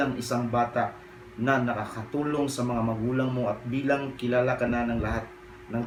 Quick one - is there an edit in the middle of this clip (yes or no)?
no